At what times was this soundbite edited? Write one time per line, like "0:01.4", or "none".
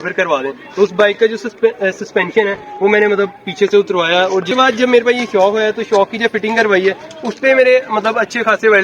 0:04.5